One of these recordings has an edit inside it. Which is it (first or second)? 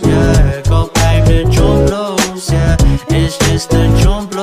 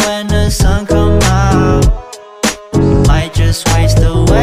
first